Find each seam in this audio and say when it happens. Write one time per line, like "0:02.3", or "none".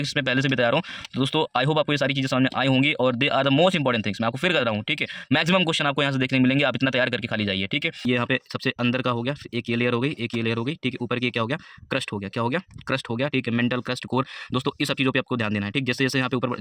0:08.0